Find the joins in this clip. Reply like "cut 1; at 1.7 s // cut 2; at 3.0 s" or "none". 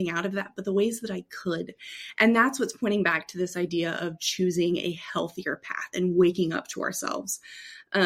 none